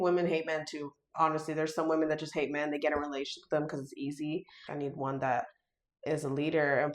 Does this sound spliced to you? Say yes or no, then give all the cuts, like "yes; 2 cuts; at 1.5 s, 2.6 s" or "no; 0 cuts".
yes; 1 cut; at 4.6 s